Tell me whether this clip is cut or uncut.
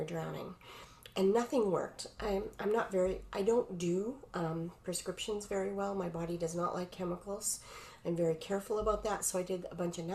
uncut